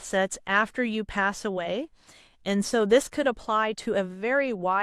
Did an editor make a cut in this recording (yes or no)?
no